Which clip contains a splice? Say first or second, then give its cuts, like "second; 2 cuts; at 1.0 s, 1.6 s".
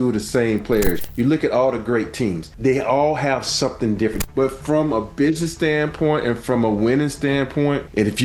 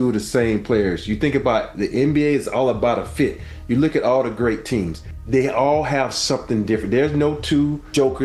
first; 3 cuts; at 1.0 s, 2.5 s, 4.2 s